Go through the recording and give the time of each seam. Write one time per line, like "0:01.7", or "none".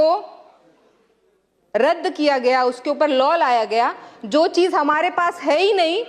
none